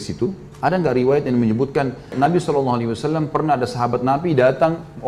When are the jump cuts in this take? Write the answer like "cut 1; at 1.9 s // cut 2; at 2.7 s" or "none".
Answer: cut 1; at 2.1 s